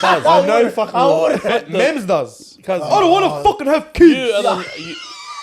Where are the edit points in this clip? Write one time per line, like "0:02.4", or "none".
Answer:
0:01.5